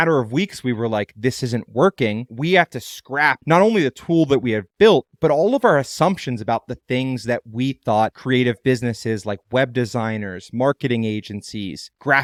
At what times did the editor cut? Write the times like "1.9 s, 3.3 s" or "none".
none